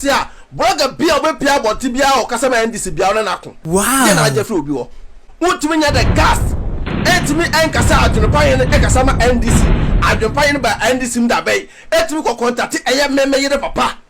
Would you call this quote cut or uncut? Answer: cut